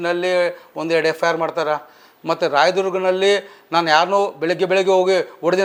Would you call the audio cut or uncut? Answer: uncut